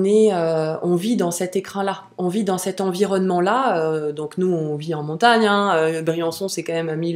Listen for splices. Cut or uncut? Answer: uncut